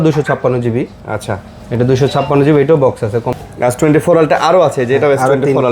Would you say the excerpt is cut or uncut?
cut